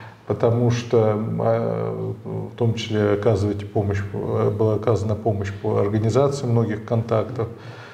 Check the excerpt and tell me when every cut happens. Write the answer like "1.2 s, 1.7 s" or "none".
none